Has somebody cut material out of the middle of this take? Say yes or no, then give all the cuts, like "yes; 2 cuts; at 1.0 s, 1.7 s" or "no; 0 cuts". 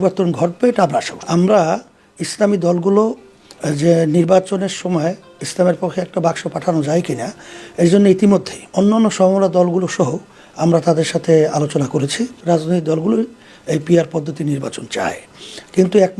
yes; 3 cuts; at 1.2 s, 8.6 s, 12.4 s